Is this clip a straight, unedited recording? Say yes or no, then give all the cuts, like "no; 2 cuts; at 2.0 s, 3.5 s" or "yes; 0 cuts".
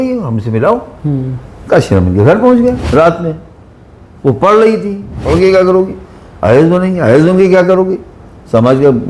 no; 2 cuts; at 2.8 s, 5.2 s